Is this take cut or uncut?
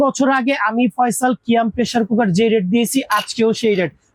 uncut